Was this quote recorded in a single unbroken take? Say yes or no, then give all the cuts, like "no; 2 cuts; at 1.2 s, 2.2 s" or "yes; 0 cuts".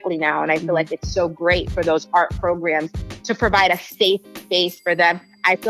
yes; 0 cuts